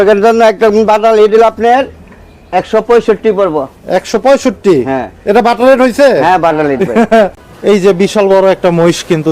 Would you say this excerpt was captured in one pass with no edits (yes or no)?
no